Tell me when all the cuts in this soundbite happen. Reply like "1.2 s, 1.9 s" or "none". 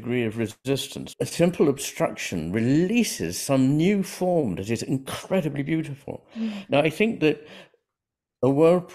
1.0 s